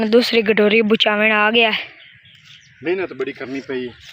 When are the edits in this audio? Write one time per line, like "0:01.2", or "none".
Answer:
none